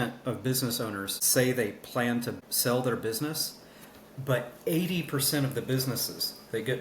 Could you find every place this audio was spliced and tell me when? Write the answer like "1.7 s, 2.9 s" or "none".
1.1 s, 2.4 s